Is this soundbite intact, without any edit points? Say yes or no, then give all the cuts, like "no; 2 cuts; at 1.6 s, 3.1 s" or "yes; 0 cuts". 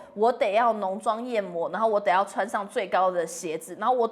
yes; 0 cuts